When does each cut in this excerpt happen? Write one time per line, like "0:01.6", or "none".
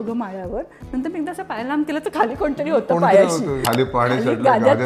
0:03.6